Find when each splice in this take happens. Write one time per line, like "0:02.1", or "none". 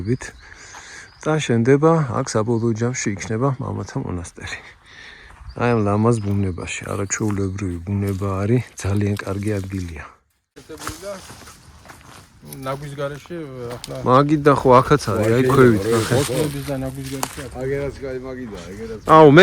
0:10.6